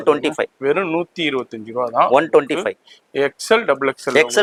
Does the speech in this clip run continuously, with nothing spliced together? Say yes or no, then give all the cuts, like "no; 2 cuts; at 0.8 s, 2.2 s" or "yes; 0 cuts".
yes; 0 cuts